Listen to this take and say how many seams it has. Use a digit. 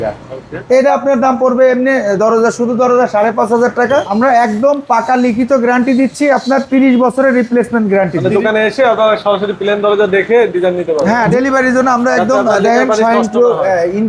3